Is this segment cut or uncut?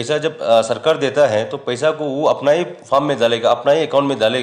uncut